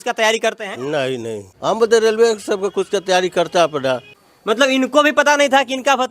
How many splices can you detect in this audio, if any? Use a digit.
2